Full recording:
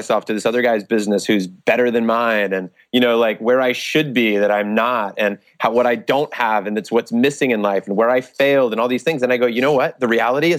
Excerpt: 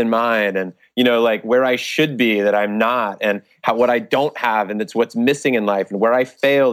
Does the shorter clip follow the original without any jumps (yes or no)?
yes